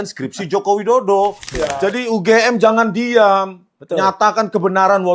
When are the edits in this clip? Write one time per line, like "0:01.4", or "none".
0:01.4